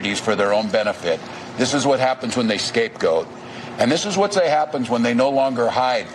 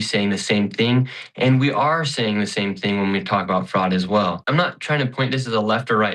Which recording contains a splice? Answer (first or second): second